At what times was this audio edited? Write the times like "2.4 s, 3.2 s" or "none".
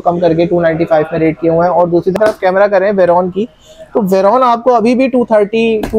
2.1 s